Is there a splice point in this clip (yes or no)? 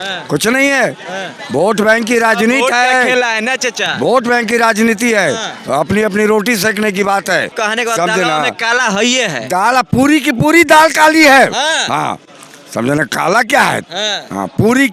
yes